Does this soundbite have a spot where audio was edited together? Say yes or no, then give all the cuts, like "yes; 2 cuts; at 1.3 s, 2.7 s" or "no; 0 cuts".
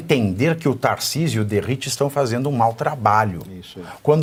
no; 0 cuts